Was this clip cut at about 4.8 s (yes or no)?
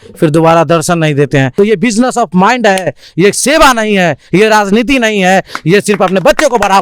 no